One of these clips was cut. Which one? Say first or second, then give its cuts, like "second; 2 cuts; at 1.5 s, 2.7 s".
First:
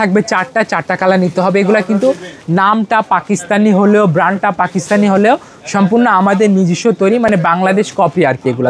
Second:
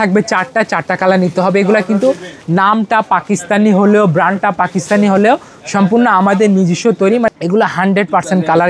second; 1 cut; at 7.3 s